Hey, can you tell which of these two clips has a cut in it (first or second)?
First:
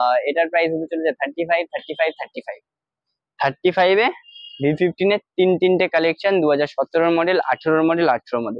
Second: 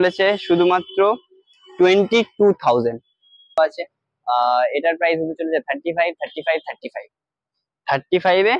second